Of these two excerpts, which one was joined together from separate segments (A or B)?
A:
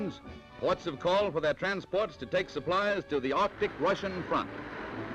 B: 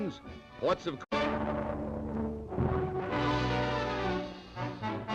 A